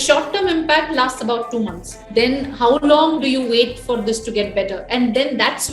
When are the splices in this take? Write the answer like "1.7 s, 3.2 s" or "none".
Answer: 1.9 s